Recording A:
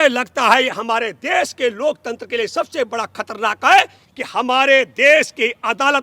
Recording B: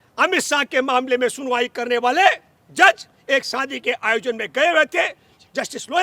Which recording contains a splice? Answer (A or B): A